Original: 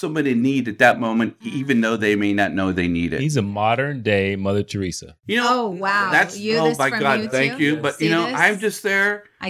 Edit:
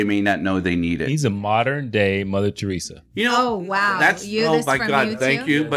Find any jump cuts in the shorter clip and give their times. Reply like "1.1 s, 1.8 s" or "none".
none